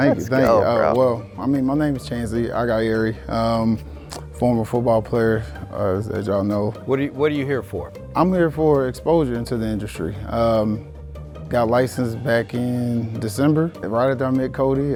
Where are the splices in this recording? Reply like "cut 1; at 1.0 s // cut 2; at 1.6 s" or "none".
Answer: none